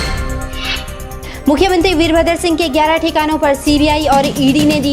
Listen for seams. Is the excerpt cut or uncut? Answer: cut